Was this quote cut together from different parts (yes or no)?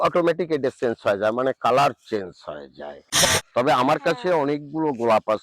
yes